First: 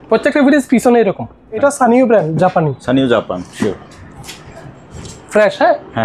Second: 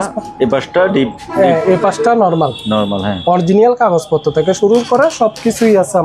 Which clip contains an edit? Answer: first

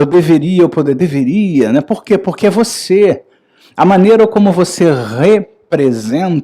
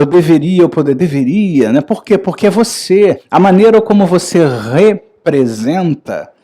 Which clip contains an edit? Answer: second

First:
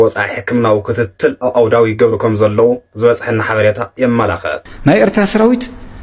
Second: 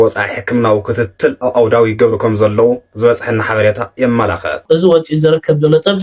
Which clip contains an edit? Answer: second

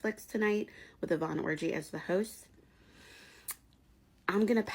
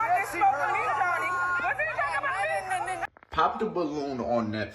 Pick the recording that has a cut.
second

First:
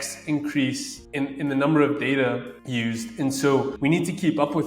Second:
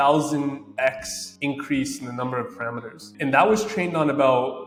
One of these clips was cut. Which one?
first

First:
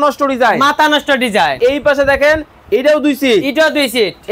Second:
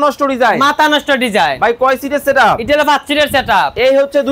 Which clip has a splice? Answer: first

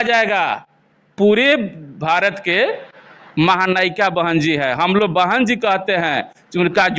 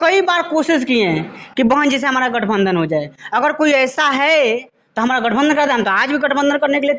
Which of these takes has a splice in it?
first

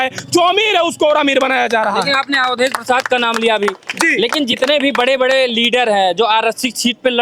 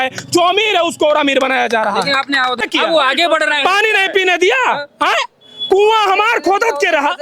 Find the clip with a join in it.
second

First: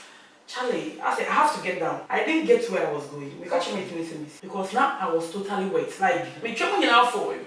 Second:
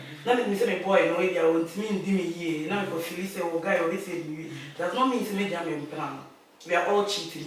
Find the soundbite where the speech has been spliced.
first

